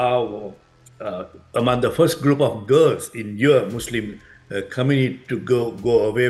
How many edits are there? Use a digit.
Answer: 0